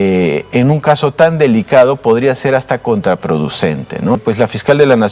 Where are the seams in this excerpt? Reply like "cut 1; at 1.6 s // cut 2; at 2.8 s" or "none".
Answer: cut 1; at 4.2 s